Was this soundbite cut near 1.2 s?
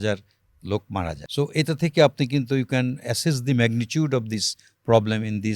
yes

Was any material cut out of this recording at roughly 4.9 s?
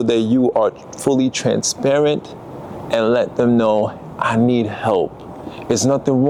no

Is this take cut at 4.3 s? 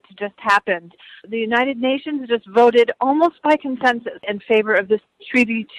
yes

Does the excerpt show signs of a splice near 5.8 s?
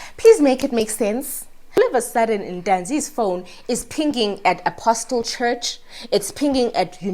no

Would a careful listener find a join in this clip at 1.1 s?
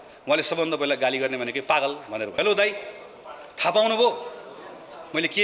no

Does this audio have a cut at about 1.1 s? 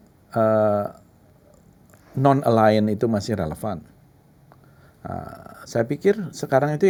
no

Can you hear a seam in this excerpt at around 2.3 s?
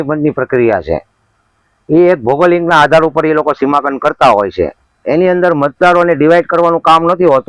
no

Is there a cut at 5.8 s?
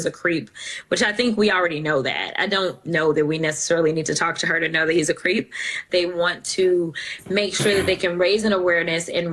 yes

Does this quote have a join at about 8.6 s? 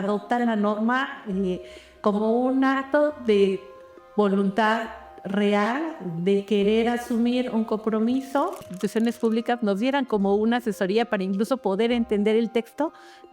yes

